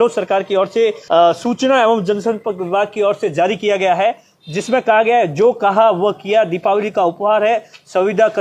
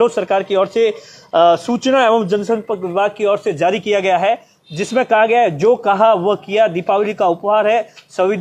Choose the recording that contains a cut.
first; 1 cut; at 1.0 s

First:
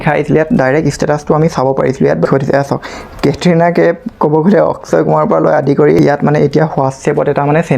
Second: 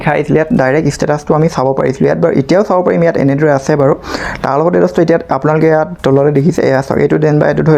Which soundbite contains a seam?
first; 2 cuts; at 2.3 s, 6.0 s

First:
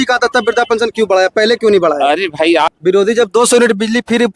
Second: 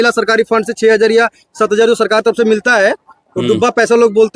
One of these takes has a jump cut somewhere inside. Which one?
first; 1 cut; at 2.7 s

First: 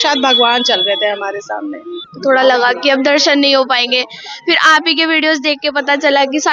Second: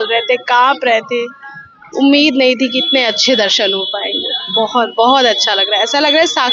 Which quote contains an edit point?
first; 1 cut; at 2.1 s

